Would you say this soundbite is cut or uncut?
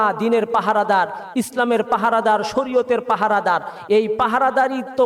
uncut